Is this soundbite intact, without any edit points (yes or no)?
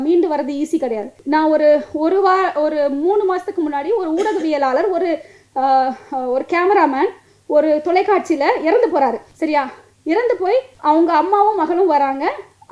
no